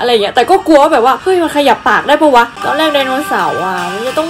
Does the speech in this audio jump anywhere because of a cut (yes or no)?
yes